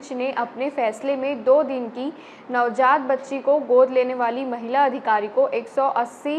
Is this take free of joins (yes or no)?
yes